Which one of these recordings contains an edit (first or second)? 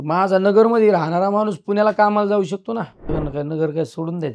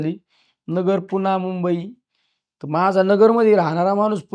first